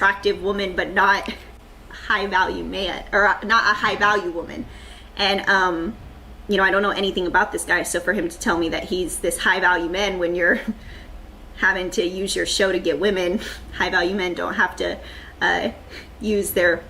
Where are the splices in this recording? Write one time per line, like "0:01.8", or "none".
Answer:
0:03.8